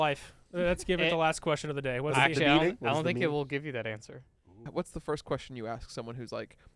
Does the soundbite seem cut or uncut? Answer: cut